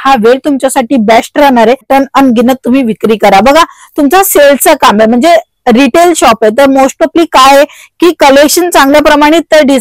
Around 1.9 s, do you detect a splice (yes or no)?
yes